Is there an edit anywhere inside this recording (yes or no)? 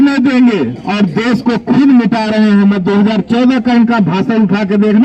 no